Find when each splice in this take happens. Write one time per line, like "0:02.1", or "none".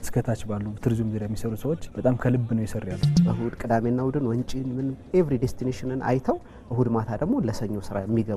0:01.9
0:03.2